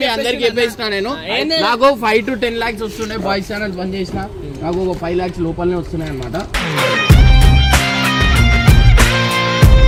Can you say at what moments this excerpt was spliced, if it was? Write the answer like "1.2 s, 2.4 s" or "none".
none